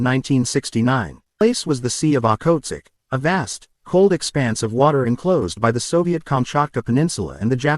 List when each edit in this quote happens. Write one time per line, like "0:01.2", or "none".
0:01.4